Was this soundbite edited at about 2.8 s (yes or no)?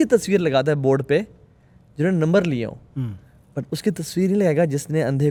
no